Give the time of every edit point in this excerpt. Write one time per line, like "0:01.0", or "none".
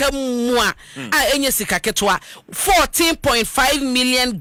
none